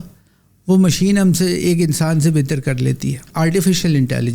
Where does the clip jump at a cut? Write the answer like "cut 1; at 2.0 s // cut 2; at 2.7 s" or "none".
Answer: cut 1; at 3.3 s